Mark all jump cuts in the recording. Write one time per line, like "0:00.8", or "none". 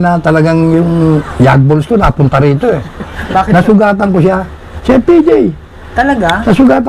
0:04.7